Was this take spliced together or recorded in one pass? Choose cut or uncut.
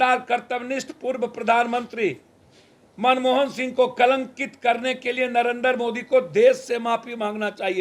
uncut